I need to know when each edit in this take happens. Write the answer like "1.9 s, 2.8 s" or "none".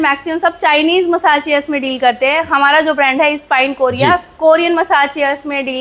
none